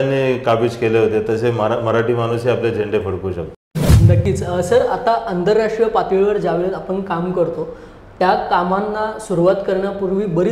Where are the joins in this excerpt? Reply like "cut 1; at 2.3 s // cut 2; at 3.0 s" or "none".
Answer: none